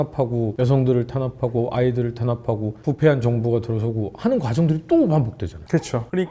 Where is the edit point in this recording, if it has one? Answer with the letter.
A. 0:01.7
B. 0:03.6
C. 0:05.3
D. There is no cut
D